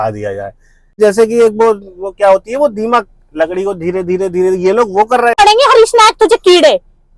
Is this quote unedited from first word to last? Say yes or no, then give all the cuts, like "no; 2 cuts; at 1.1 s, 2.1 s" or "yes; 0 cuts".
no; 2 cuts; at 1.0 s, 5.4 s